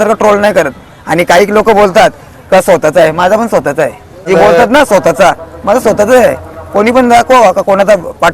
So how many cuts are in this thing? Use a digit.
1